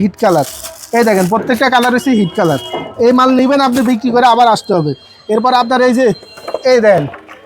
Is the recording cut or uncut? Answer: uncut